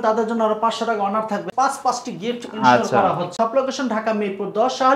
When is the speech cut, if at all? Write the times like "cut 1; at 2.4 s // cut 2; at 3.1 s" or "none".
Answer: cut 1; at 1.5 s // cut 2; at 3.3 s